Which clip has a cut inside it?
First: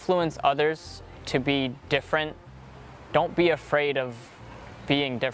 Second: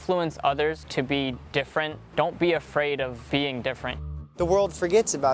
second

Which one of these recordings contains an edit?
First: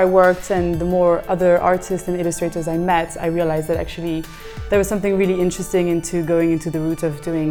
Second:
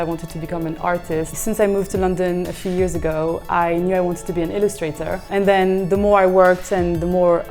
second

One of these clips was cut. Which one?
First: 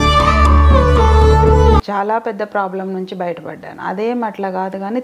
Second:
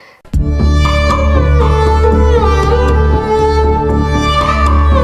first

